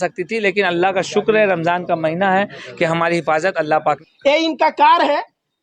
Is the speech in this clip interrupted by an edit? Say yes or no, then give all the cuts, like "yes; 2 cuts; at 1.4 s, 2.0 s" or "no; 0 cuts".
yes; 1 cut; at 4.0 s